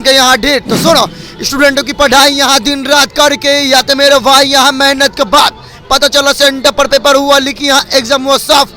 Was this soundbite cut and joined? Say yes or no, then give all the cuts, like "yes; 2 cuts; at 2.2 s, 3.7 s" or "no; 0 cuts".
no; 0 cuts